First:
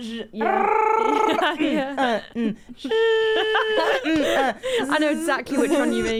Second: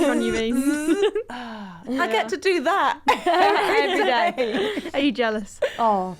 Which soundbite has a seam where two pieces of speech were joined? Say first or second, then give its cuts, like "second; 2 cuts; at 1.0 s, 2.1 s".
second; 1 cut; at 2.0 s